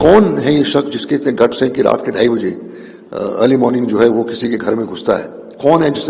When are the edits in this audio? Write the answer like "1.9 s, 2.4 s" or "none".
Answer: none